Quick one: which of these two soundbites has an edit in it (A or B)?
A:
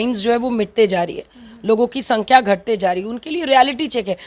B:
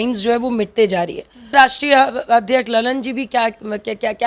B